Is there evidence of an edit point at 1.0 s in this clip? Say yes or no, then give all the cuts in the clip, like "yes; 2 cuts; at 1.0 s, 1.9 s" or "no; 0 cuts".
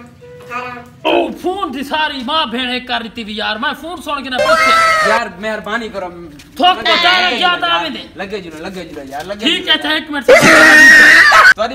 yes; 1 cut; at 1.0 s